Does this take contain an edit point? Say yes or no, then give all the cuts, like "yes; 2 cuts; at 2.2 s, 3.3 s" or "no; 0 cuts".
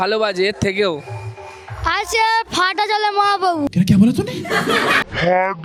no; 0 cuts